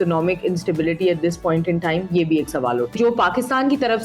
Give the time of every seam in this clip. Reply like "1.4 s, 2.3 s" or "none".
3.0 s